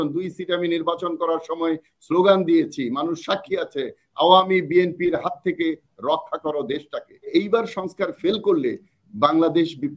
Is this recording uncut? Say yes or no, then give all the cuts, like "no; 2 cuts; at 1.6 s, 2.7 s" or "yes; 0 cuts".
no; 1 cut; at 7.3 s